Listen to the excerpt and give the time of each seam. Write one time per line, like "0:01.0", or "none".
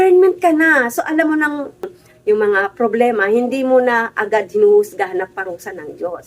0:02.0